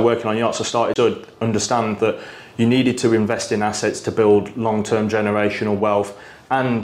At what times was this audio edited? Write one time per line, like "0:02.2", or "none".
0:00.9